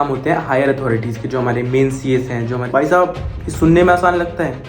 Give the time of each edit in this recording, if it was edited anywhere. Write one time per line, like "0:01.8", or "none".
0:02.6